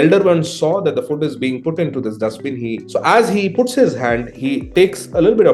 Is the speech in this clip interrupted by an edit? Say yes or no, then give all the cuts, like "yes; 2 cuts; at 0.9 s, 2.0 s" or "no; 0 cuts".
yes; 2 cuts; at 2.8 s, 4.3 s